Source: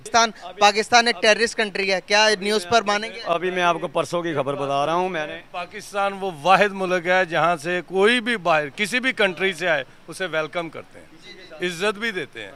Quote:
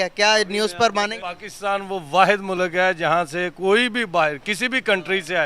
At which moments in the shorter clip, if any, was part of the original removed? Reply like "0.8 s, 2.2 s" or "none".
1.2 s

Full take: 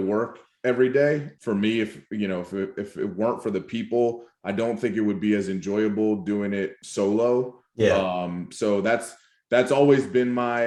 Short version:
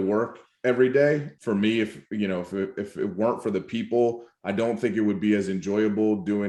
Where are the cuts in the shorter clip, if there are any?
none

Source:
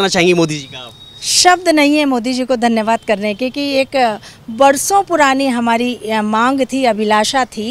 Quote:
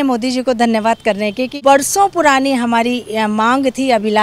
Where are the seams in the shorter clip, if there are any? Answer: 1.5 s

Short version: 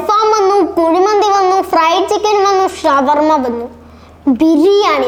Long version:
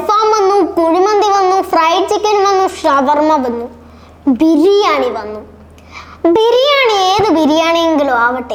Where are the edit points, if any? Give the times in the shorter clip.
none

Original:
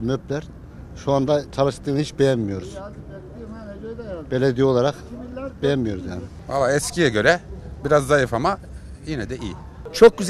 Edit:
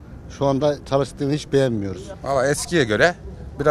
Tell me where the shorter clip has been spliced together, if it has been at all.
2.1 s

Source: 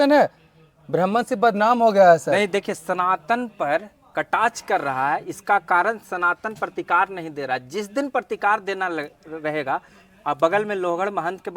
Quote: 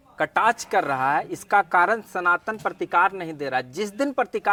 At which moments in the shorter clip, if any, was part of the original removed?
none

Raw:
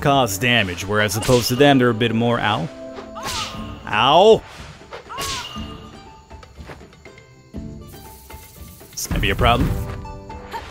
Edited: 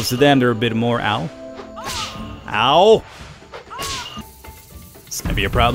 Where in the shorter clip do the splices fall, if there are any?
4.2 s

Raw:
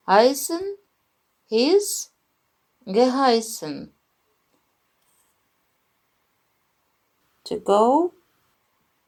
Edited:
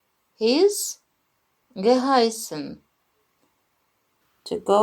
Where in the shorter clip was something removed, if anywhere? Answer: 3.8 s

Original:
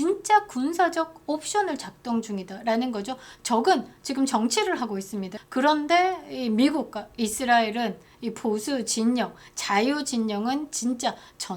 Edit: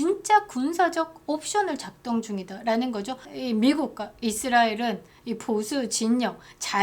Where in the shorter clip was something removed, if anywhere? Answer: 3.3 s

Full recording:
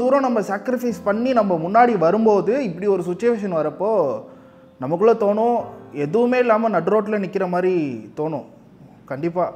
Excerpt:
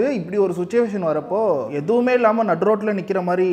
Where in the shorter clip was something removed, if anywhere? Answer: 1.7 s

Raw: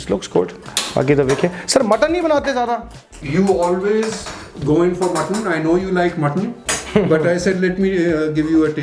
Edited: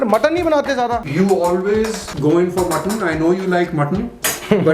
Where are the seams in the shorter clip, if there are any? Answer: 1.1 s, 2.0 s

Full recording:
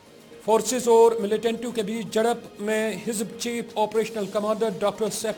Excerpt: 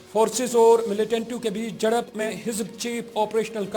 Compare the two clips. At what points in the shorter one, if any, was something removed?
2.3 s

